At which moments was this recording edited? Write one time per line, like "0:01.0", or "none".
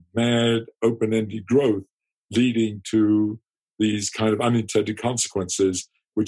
none